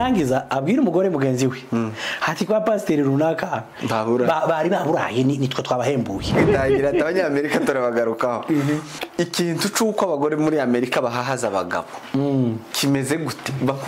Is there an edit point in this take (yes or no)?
yes